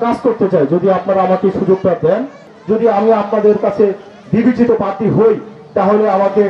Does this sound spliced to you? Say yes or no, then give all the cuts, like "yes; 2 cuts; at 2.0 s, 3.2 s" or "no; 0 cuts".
yes; 1 cut; at 2.5 s